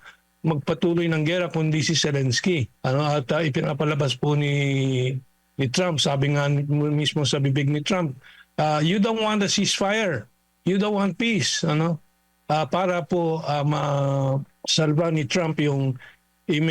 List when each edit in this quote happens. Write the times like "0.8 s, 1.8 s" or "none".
2.7 s, 14.5 s